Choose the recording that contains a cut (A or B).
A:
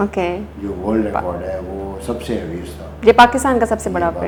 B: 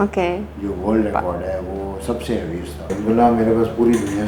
B